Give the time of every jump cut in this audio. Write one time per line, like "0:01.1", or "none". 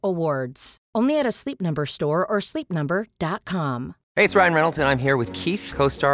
0:04.0